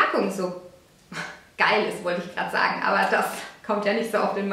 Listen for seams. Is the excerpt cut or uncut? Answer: uncut